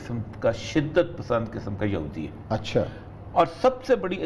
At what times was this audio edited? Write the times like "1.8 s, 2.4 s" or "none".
none